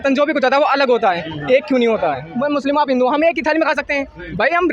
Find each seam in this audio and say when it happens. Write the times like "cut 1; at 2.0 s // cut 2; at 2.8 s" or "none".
cut 1; at 2.3 s